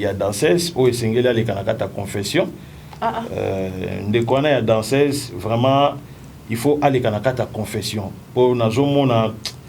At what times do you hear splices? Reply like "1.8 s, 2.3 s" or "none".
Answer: none